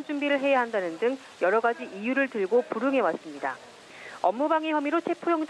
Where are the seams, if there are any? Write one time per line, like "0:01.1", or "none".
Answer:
none